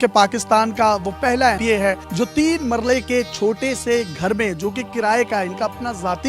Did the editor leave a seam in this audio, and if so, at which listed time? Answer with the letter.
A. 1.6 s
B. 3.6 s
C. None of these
A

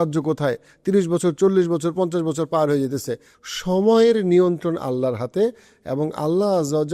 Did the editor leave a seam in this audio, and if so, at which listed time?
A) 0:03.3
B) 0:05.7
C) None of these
A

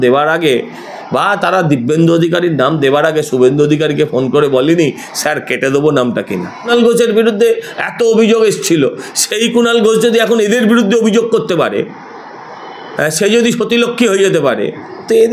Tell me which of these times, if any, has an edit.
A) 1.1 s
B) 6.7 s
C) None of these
B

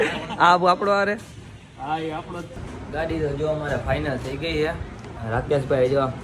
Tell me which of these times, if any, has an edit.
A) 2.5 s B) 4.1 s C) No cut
A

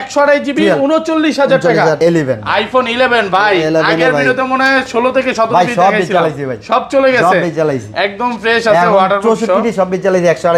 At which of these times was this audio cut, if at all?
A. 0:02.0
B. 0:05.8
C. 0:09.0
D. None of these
A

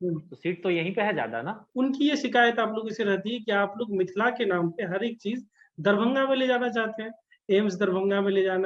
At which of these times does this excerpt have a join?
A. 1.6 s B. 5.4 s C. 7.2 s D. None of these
A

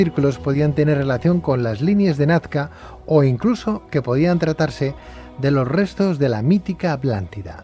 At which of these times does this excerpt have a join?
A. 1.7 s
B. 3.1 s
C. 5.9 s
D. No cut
C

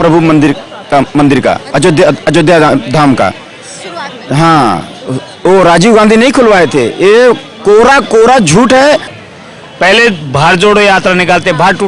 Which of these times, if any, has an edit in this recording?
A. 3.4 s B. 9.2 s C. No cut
B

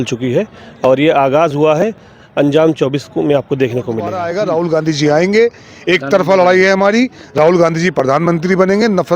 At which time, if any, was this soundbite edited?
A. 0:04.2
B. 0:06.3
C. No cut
A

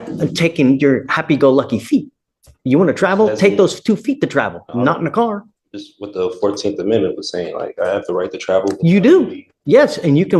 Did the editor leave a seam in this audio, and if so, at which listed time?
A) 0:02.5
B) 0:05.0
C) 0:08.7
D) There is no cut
D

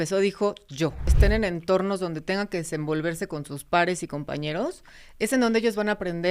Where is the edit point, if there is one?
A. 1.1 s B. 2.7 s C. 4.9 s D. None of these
A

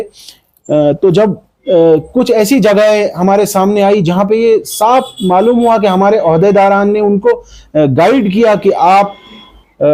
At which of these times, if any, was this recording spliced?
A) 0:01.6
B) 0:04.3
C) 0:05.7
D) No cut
D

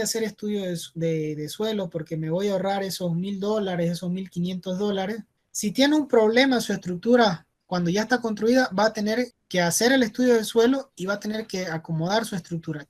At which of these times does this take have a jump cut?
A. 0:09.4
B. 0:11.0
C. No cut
A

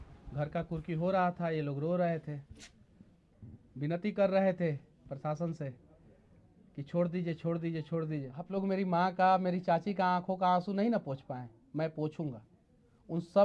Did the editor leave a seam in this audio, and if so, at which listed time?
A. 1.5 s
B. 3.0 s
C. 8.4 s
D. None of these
C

